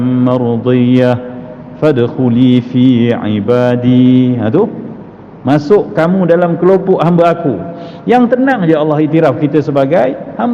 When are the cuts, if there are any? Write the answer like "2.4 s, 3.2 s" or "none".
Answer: none